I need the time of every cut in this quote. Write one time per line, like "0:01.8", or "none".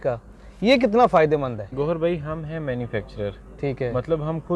0:01.7